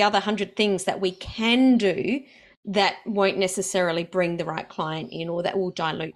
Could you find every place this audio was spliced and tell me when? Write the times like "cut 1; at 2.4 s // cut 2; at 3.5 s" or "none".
none